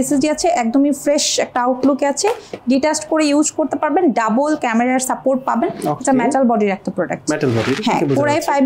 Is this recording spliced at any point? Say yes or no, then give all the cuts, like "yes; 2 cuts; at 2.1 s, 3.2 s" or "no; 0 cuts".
no; 0 cuts